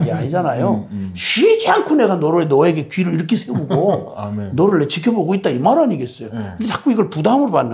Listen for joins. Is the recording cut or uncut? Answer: uncut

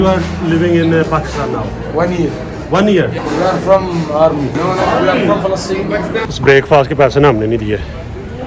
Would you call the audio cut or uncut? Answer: cut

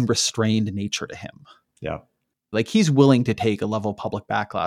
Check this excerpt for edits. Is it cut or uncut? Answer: cut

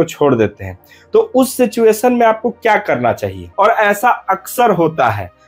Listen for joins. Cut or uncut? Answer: cut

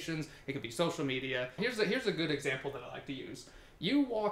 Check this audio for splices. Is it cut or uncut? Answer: cut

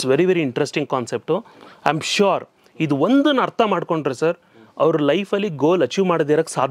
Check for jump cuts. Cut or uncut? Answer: uncut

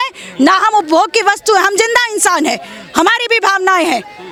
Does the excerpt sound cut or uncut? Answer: uncut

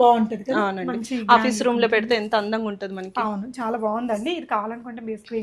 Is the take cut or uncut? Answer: uncut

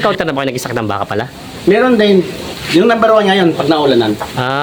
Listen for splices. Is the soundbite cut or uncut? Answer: uncut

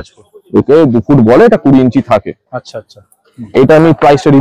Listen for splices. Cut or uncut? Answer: uncut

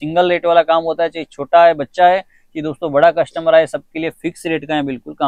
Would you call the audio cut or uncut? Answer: uncut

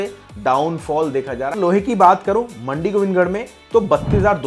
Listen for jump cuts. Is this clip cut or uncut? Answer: cut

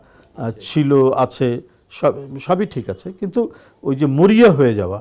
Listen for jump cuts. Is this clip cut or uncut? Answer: uncut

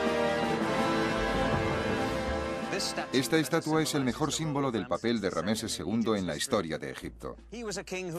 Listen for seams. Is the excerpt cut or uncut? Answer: cut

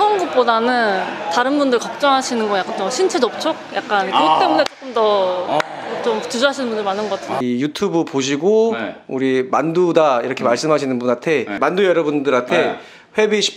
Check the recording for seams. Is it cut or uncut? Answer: cut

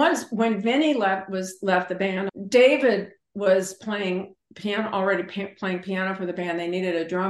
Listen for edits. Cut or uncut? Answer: cut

